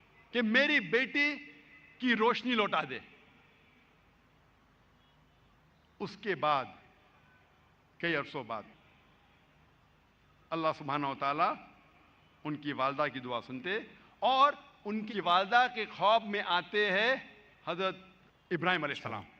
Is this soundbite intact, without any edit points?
yes; 0 cuts

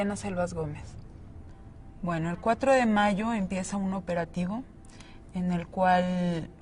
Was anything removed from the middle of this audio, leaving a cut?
no; 0 cuts

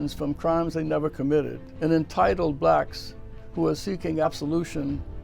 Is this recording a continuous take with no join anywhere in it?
no; 2 cuts; at 1.6 s, 4.2 s

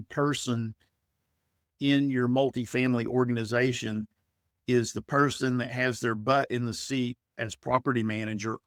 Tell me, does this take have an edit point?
no; 0 cuts

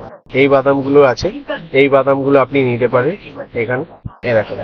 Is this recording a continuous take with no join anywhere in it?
yes; 0 cuts

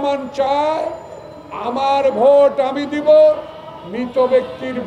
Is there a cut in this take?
no; 0 cuts

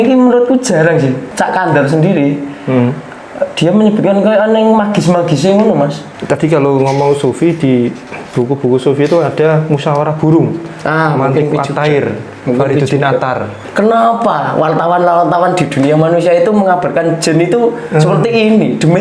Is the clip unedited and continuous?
no; 3 cuts; at 1.3 s, 6.1 s, 13.6 s

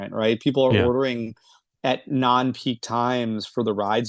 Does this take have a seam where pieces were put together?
no; 0 cuts

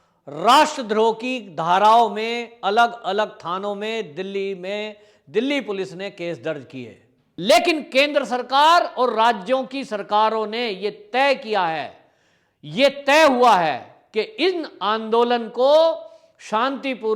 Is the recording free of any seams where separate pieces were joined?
no; 1 cut; at 7.3 s

